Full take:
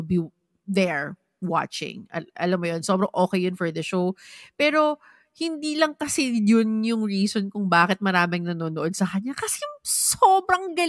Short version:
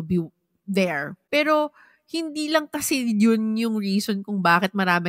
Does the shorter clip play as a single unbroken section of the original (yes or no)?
no